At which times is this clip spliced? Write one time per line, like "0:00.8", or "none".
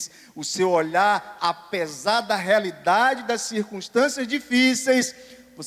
none